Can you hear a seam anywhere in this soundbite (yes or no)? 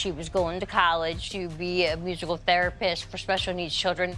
yes